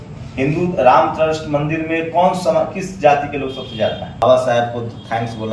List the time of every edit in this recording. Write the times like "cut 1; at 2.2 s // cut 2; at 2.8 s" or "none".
cut 1; at 4.2 s